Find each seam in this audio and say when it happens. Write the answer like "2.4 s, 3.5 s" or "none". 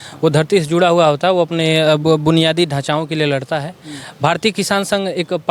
none